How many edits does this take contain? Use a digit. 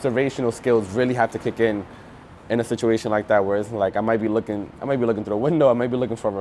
0